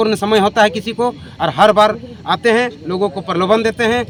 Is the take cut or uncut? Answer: uncut